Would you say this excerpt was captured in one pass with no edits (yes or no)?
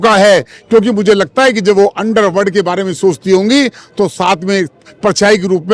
yes